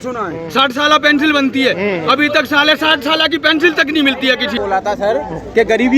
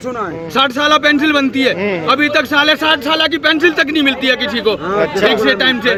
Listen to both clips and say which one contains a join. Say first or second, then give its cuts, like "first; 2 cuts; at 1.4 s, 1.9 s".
first; 1 cut; at 4.5 s